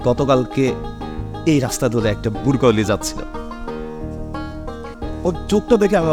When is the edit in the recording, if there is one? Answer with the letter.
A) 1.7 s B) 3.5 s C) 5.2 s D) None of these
D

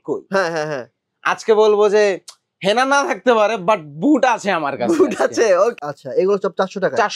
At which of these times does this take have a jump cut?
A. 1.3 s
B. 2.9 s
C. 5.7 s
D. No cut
C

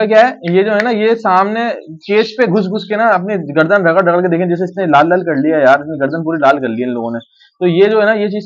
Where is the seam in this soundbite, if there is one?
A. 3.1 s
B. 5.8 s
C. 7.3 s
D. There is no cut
D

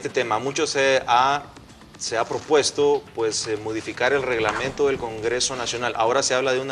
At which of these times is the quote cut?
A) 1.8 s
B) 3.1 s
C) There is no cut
B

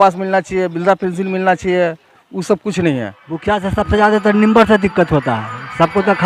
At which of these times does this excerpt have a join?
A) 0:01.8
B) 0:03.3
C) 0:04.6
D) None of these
B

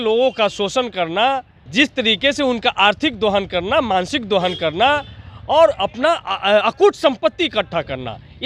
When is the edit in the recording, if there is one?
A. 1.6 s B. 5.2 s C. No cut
A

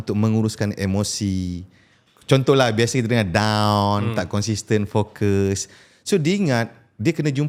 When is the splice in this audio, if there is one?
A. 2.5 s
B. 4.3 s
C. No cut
C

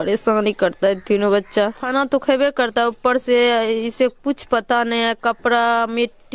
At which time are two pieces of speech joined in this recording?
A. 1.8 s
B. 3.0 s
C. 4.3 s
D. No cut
A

